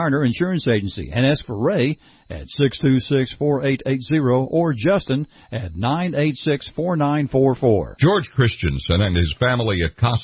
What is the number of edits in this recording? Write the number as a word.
one